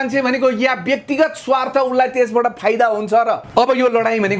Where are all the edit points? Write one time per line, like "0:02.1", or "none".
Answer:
0:03.4